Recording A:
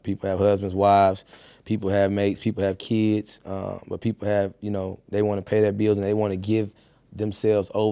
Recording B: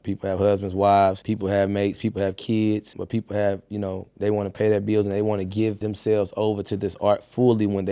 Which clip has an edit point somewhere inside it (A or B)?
B